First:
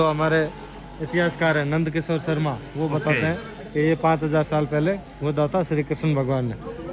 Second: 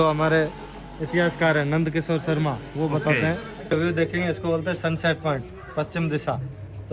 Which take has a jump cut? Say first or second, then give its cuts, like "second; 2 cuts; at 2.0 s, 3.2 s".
second; 1 cut; at 3.5 s